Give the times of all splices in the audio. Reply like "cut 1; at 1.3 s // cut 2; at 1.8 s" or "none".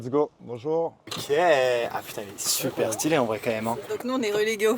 cut 1; at 1.1 s // cut 2; at 3.9 s